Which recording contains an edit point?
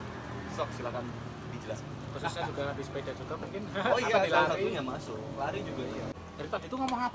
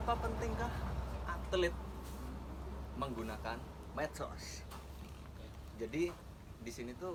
first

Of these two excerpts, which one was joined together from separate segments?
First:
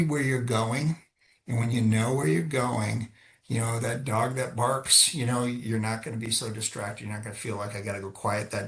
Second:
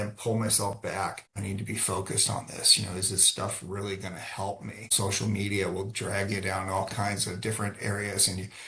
second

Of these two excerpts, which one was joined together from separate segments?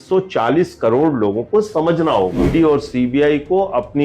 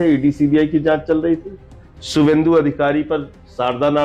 first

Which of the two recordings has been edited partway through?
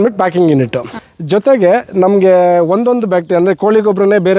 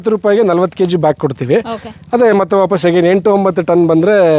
first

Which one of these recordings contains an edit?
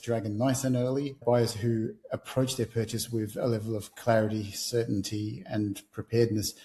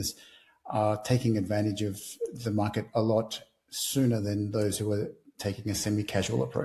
first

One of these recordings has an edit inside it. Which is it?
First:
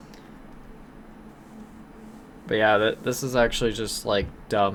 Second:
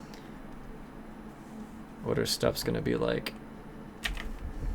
second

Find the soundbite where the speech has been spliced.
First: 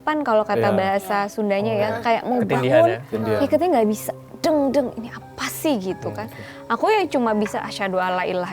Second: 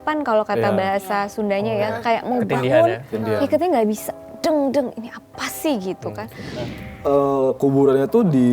second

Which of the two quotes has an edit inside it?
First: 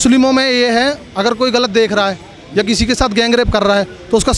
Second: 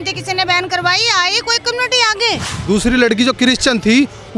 second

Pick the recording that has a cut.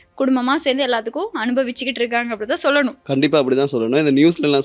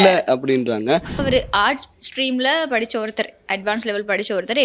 second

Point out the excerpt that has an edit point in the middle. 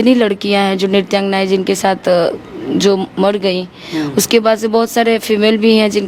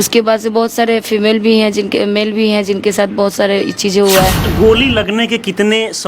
second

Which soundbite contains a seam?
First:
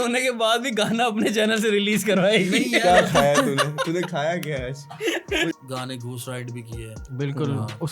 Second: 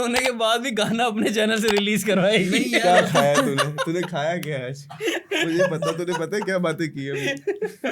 first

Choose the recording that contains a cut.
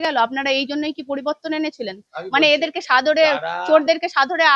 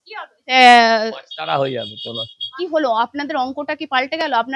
second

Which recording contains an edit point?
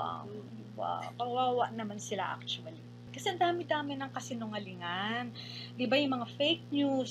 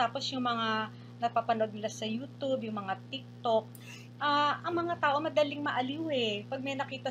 first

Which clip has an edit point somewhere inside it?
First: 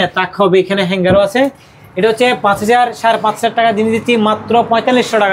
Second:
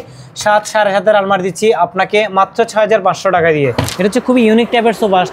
second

